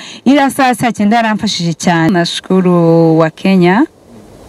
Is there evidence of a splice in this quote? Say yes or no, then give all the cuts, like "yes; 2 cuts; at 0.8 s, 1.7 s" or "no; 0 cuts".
yes; 1 cut; at 2.1 s